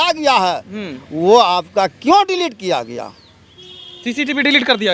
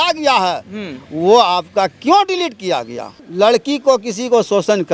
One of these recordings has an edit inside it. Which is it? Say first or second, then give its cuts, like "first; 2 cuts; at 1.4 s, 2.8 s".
second; 1 cut; at 3.3 s